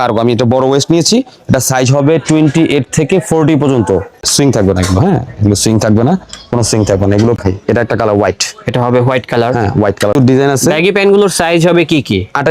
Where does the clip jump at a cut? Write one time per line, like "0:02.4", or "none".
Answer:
0:04.3
0:07.4
0:10.1